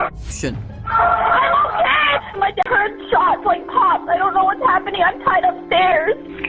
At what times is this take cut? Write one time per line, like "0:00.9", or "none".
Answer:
0:02.6